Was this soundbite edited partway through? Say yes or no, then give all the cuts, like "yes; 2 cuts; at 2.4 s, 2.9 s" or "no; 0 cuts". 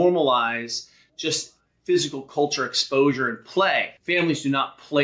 yes; 1 cut; at 3.9 s